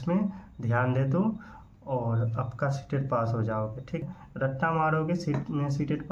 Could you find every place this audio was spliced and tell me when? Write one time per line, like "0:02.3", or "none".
0:04.0